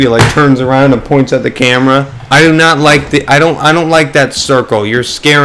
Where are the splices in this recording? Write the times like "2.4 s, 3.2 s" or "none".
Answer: 2.2 s